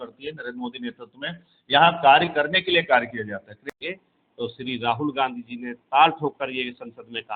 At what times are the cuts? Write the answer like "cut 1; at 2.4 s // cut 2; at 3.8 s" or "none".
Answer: cut 1; at 3.6 s